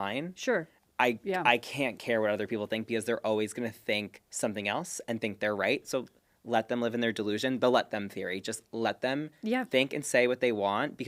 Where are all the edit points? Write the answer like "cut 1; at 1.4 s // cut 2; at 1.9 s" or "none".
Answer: none